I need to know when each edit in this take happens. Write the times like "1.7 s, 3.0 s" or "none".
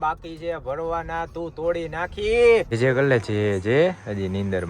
2.7 s